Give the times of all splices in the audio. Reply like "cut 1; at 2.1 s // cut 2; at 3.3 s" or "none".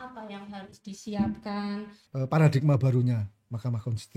cut 1; at 2.0 s